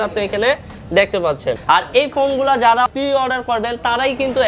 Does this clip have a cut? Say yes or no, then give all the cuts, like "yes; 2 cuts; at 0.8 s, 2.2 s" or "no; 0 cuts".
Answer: yes; 2 cuts; at 1.6 s, 2.9 s